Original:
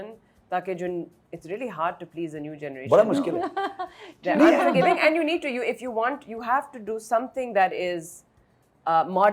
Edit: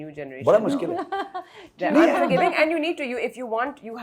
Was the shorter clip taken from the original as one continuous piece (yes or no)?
yes